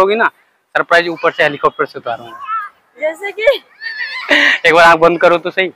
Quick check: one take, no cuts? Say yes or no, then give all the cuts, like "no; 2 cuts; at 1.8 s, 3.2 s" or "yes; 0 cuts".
yes; 0 cuts